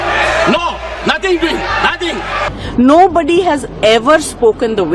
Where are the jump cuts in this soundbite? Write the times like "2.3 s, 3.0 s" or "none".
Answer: 2.4 s